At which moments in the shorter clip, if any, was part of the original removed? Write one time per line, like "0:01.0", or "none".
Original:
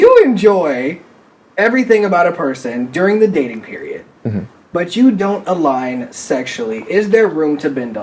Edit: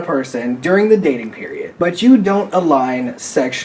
0:01.6

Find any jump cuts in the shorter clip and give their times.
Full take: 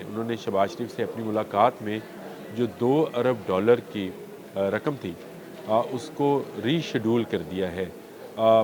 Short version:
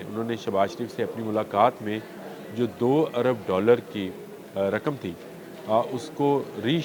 none

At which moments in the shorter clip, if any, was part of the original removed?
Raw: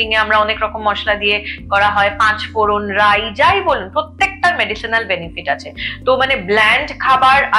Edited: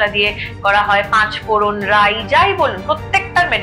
none

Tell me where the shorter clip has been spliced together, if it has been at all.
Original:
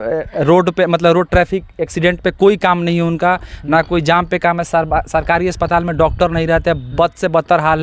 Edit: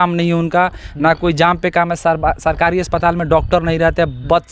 none

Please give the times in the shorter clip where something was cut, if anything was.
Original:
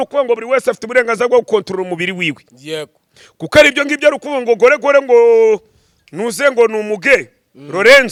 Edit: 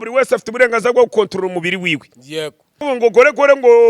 0:02.8

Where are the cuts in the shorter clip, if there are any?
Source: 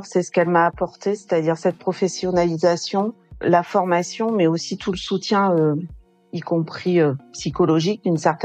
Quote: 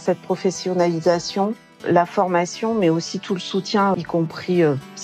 0:03.9

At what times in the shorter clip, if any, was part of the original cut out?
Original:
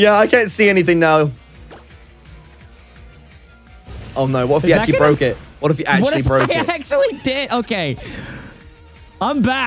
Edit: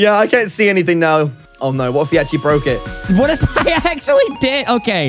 0:01.4
0:03.0

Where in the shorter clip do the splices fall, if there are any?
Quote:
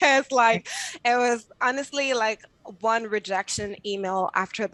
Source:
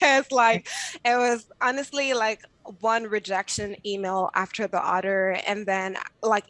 none

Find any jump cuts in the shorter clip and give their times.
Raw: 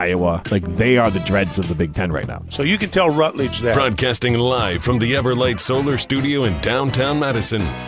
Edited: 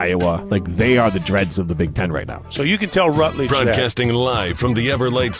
0:03.6

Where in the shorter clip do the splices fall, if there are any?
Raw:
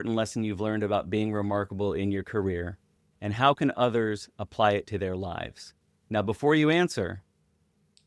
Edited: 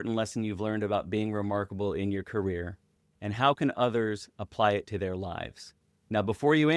none

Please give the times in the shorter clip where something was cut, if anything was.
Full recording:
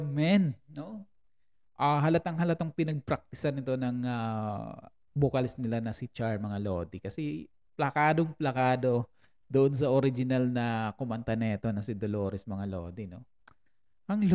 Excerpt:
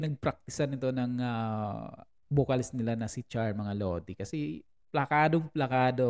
none

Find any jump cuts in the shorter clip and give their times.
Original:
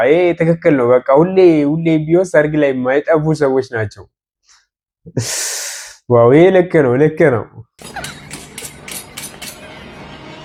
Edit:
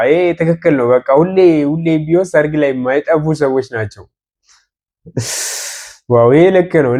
none

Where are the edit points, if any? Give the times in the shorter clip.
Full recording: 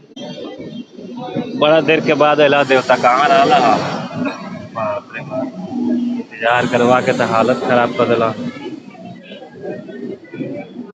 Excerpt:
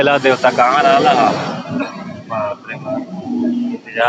none

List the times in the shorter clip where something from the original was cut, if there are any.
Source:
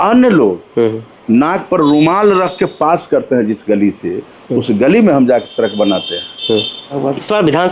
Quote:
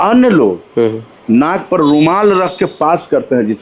none

